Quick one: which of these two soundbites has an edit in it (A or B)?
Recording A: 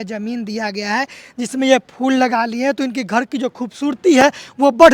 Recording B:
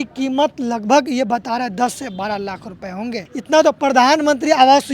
B